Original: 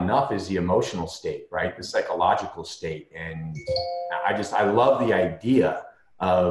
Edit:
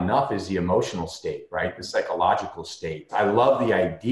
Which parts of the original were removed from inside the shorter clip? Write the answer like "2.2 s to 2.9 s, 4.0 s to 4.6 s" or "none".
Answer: 3.1 s to 4.5 s